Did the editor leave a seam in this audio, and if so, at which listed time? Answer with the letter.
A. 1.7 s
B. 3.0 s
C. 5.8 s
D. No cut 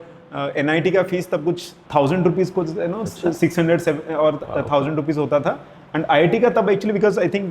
A